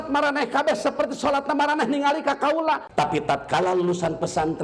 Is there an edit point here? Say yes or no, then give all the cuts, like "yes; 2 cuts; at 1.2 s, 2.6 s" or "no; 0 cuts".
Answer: yes; 1 cut; at 2.9 s